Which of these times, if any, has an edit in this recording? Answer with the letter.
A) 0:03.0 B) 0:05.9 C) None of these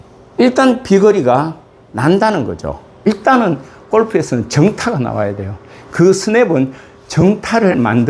A